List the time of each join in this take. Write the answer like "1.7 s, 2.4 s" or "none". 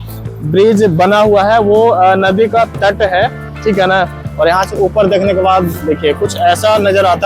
4.2 s